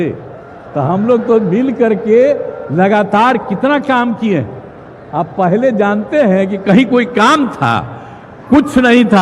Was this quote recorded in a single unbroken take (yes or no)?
yes